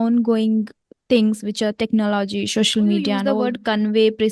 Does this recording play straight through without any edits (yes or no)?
no